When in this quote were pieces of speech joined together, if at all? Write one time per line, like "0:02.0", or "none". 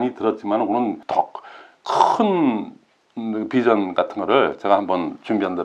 0:01.0